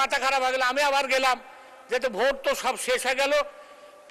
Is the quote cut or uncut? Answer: uncut